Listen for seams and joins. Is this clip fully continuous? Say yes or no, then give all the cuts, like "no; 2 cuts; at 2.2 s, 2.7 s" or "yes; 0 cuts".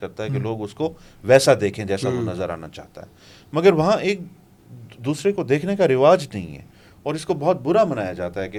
yes; 0 cuts